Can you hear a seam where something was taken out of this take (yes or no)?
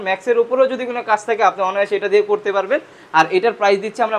no